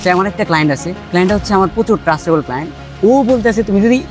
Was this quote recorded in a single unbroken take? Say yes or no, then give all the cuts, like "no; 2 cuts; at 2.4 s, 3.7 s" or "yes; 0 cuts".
no; 2 cuts; at 0.9 s, 2.8 s